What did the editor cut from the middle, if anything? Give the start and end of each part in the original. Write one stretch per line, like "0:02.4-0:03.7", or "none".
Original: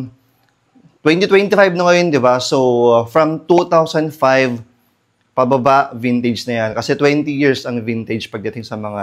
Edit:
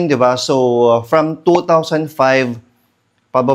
none